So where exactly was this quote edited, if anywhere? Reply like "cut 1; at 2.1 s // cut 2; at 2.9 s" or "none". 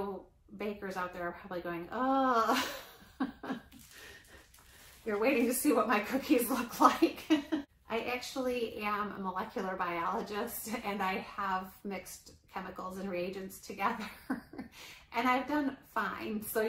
cut 1; at 7.7 s

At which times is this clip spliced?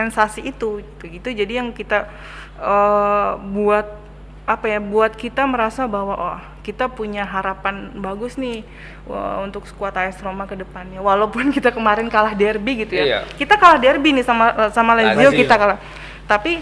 none

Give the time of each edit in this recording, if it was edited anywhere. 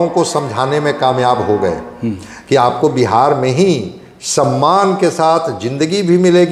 none

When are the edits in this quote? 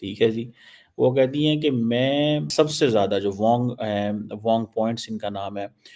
cut 1; at 2.5 s

